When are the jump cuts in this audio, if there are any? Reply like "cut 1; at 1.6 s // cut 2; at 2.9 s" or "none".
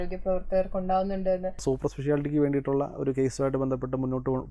cut 1; at 1.6 s